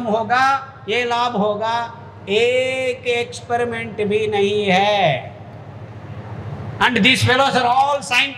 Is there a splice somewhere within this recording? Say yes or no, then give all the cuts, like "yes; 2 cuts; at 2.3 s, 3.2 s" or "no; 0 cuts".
no; 0 cuts